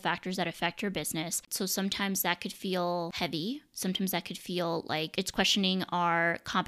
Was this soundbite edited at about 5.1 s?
yes; 3 cuts; at 1.4 s, 3.1 s, 5.1 s

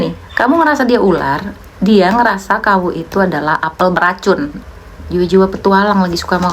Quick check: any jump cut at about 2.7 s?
no; 1 cut; at 4.6 s

